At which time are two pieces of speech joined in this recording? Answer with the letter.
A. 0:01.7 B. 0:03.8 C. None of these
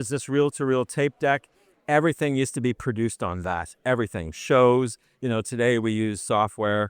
A